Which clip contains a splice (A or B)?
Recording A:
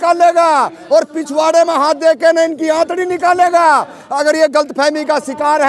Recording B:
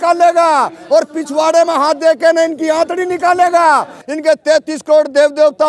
B